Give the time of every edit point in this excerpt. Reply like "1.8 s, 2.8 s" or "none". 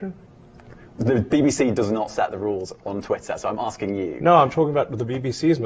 none